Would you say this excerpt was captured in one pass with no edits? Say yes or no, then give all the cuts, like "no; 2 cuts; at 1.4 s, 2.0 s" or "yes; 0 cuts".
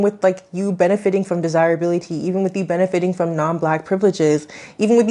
yes; 0 cuts